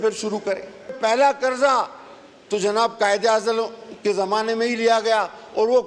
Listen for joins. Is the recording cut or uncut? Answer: cut